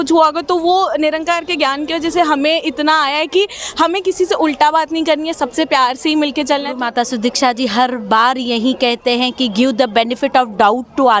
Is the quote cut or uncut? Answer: cut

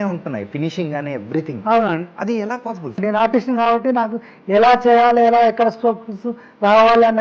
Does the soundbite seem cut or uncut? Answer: cut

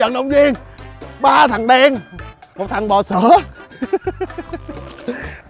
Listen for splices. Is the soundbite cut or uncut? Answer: uncut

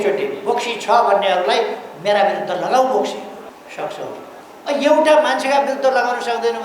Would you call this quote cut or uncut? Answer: cut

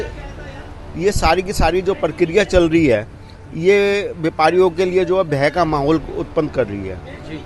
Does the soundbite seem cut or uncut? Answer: uncut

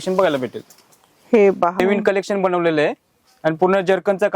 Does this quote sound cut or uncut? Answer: cut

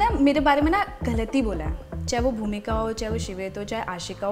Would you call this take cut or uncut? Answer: uncut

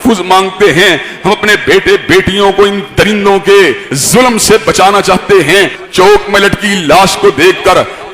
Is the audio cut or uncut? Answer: cut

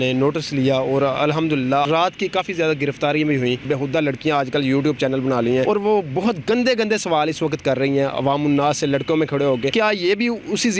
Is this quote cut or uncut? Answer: cut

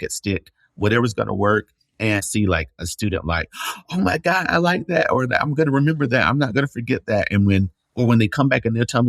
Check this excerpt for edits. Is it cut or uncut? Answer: cut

